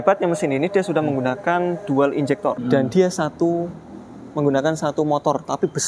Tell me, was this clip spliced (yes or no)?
yes